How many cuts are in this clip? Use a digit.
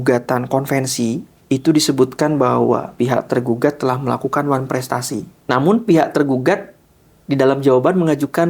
3